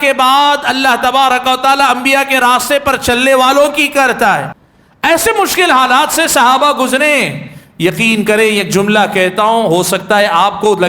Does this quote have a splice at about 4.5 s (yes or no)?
yes